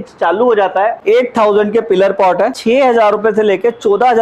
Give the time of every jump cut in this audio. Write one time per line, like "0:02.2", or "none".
0:01.0
0:02.6